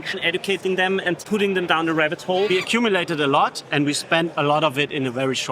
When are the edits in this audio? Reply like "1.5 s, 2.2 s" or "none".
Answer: 1.2 s, 2.5 s